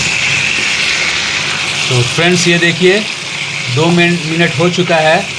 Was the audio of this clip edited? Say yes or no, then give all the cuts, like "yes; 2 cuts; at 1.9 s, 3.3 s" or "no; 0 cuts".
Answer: no; 0 cuts